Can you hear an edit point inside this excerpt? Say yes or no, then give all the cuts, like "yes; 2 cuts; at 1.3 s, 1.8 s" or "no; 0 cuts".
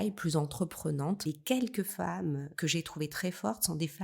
yes; 2 cuts; at 1.2 s, 2.5 s